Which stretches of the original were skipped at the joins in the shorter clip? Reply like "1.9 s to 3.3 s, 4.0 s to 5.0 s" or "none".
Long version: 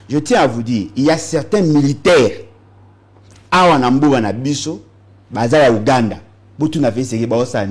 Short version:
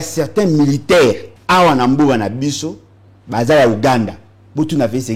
2.5 s to 3.3 s